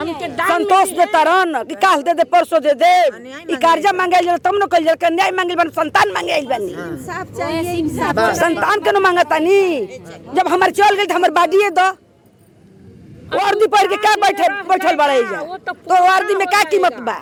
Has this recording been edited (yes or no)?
no